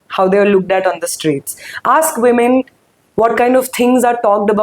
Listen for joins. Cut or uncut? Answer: uncut